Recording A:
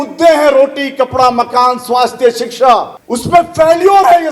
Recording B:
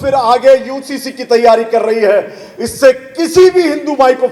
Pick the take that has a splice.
A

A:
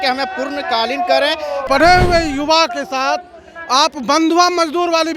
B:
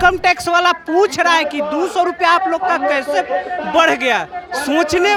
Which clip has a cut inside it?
A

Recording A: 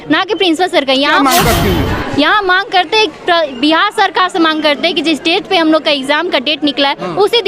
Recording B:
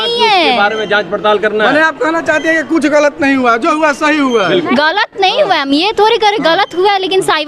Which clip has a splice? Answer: A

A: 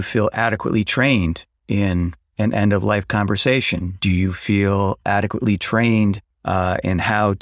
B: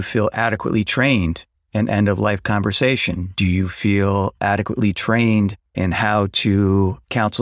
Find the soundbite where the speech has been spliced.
B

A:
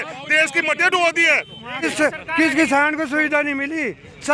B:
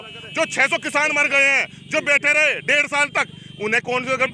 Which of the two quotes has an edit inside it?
A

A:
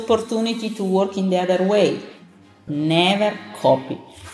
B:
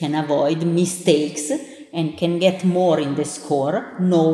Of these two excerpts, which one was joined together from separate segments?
A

